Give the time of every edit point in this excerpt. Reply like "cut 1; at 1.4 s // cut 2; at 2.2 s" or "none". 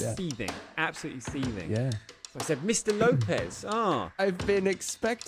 cut 1; at 4.1 s